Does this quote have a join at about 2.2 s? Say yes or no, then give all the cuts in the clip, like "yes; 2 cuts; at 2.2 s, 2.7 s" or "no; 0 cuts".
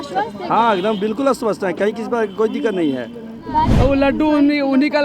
no; 1 cut; at 3.7 s